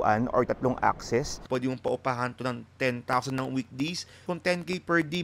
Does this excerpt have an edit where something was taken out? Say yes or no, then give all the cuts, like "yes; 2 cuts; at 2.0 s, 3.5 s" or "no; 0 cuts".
yes; 2 cuts; at 1.4 s, 4.1 s